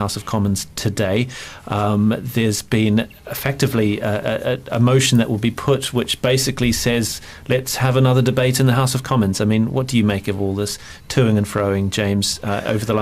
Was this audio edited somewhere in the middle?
yes; 1 cut; at 5.6 s

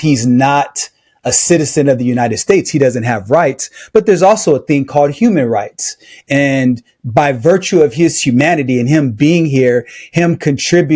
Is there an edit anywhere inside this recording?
no; 0 cuts

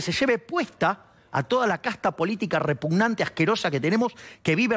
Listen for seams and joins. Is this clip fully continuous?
yes; 0 cuts

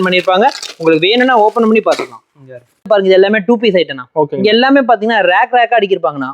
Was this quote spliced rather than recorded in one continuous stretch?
yes; 1 cut; at 2.9 s

